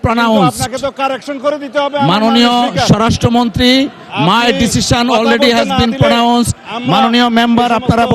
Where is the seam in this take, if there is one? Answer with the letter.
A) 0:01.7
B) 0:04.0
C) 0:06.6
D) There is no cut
D